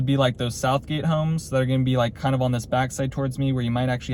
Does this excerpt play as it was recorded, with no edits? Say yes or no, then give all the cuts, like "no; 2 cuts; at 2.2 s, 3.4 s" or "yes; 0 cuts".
yes; 0 cuts